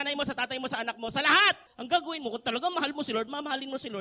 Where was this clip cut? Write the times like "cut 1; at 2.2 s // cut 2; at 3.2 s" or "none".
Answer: cut 1; at 1.7 s